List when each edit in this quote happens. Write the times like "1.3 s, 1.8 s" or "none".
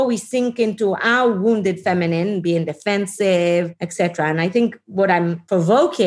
3.8 s, 5.2 s